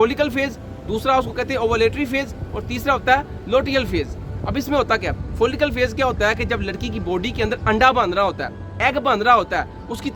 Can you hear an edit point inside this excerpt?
no; 0 cuts

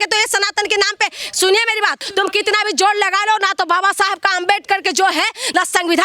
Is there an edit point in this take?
yes; 1 cut; at 2.0 s

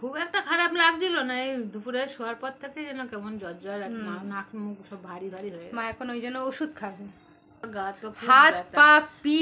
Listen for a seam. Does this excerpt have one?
yes; 1 cut; at 7.7 s

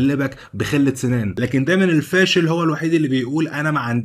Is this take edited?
yes; 1 cut; at 1.3 s

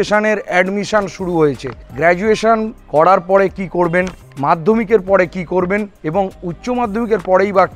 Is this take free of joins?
yes; 0 cuts

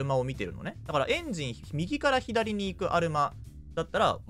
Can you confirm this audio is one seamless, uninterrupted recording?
yes; 0 cuts

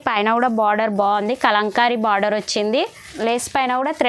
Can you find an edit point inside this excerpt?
yes; 1 cut; at 3.0 s

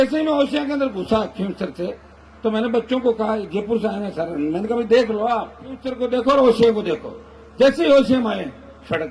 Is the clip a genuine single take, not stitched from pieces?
no; 1 cut; at 5.9 s

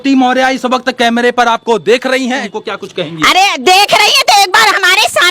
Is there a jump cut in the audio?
yes; 1 cut; at 2.5 s

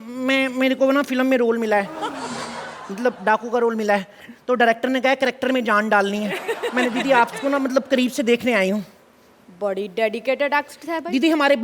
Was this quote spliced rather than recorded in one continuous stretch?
no; 0 cuts

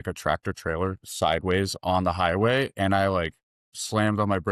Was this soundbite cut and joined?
no; 0 cuts

